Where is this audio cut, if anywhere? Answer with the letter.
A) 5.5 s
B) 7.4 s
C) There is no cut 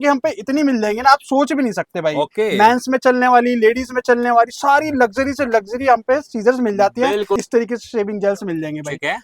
B